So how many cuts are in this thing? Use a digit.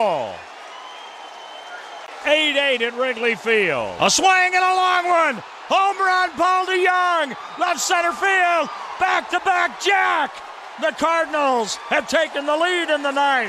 1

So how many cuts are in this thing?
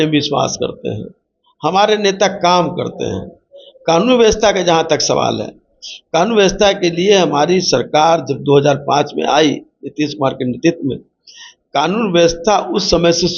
0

